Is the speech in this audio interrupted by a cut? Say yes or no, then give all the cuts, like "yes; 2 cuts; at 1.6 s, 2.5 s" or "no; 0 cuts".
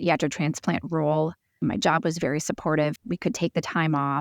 yes; 2 cuts; at 1.6 s, 3.0 s